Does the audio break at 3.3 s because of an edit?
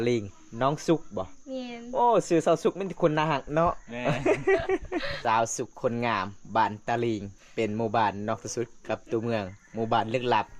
no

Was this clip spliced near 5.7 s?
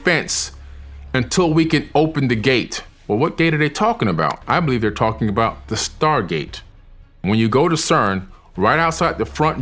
no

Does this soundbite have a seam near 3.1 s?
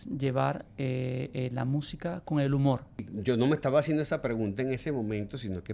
yes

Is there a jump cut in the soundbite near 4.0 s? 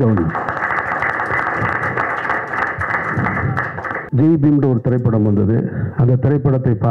yes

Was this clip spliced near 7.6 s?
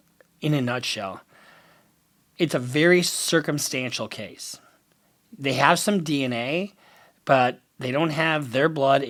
no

